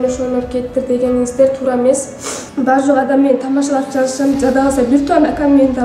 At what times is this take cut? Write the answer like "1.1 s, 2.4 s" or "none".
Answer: 2.4 s